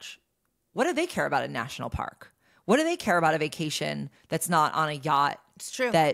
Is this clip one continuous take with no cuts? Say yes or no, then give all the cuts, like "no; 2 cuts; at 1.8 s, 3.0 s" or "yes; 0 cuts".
yes; 0 cuts